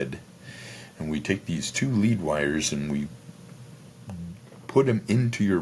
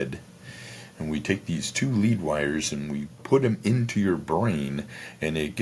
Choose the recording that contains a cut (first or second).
second